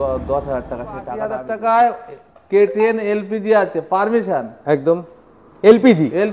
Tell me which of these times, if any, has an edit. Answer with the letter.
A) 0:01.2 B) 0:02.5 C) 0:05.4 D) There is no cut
A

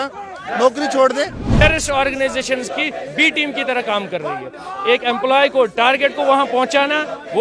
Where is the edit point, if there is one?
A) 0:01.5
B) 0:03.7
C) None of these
A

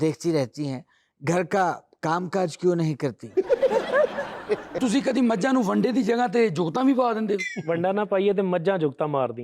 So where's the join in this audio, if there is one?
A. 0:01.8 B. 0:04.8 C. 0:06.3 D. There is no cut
B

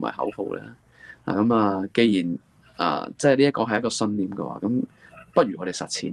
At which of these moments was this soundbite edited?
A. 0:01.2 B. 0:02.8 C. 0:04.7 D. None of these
D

